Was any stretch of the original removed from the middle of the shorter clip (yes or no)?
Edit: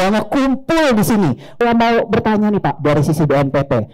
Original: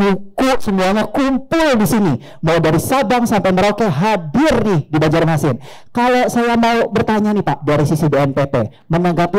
yes